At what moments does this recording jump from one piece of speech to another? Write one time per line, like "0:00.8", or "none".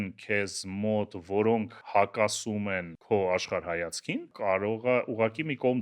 0:01.8
0:02.9
0:04.3